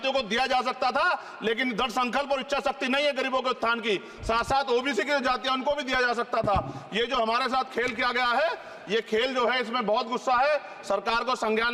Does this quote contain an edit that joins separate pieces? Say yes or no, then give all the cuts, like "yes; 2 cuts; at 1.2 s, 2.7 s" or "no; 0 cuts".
no; 0 cuts